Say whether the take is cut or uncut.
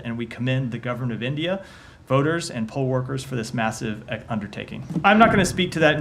cut